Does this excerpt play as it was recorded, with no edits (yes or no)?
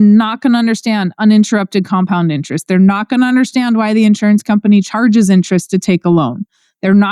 yes